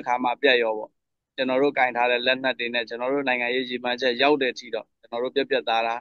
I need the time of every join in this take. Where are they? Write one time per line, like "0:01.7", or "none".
none